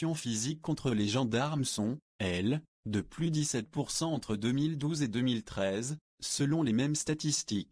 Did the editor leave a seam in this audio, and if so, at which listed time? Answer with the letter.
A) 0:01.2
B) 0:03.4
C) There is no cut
B